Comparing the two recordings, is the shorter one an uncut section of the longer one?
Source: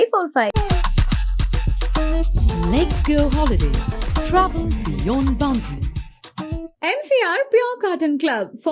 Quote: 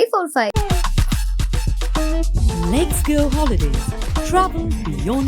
yes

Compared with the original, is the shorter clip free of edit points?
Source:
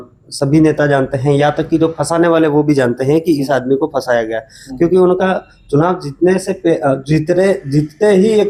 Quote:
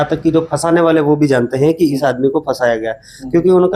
yes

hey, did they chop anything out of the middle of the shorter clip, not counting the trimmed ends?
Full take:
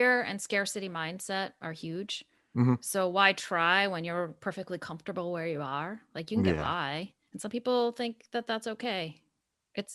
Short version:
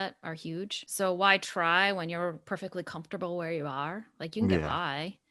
yes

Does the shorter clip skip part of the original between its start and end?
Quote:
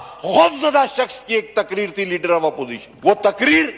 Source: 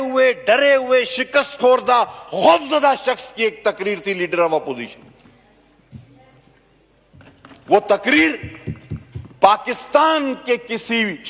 yes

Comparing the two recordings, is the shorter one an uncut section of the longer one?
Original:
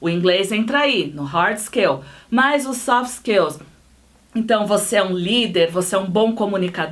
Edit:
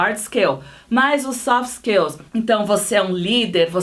no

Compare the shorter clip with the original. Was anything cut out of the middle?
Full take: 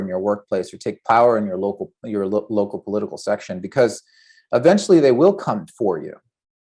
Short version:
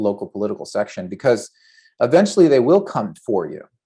no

